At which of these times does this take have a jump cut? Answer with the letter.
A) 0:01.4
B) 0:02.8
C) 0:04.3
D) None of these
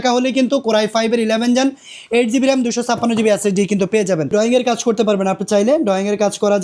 C